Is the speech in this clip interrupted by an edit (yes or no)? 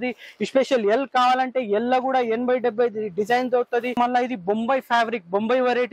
yes